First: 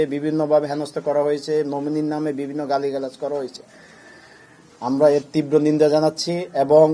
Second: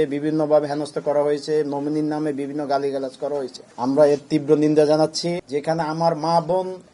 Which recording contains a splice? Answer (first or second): second